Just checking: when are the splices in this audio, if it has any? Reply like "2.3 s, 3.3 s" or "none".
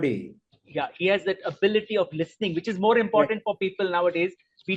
none